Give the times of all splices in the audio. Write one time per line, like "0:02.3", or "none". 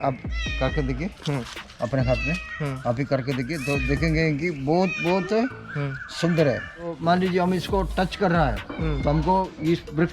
0:07.0